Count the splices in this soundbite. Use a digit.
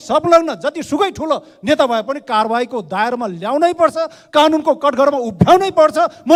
0